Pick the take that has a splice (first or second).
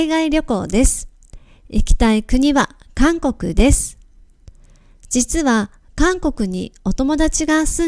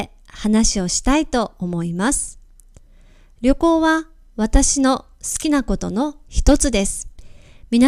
first